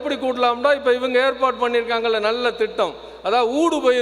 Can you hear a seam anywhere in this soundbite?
no; 0 cuts

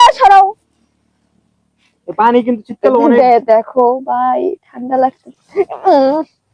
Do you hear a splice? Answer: no; 0 cuts

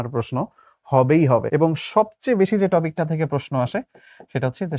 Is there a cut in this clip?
yes; 1 cut; at 1.4 s

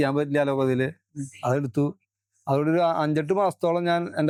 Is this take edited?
no; 0 cuts

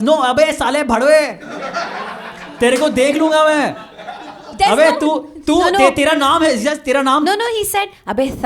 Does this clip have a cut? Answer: no; 0 cuts

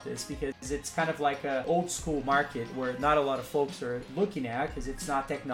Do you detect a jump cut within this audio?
yes; 2 cuts; at 1.6 s, 4.1 s

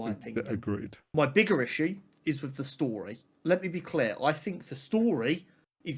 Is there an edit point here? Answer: yes; 2 cuts; at 1.0 s, 3.3 s

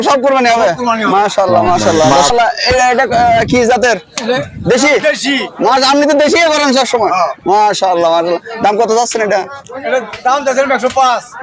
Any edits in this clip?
yes; 1 cut; at 2.3 s

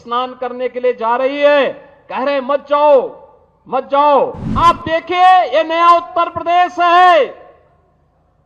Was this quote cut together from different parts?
yes; 1 cut; at 4.4 s

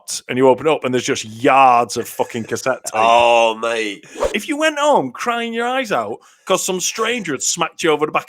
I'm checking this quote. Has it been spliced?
yes; 1 cut; at 4.2 s

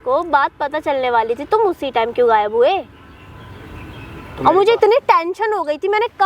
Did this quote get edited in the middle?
no; 0 cuts

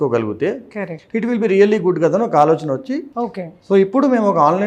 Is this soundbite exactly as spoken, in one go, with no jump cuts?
yes; 0 cuts

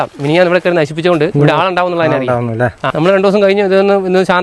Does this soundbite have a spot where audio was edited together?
yes; 2 cuts; at 1.3 s, 2.9 s

